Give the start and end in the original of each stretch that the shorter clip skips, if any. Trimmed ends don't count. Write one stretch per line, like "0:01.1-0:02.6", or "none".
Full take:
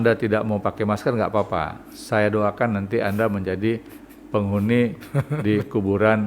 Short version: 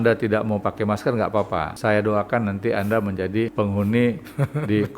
0:01.7-0:02.0
0:03.8-0:04.3